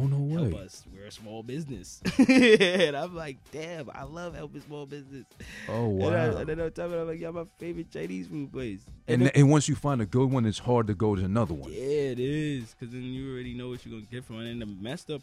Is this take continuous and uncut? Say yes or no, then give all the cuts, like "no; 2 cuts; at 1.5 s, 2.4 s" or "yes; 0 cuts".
no; 1 cut; at 14.2 s